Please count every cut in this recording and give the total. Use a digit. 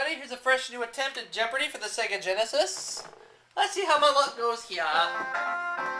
1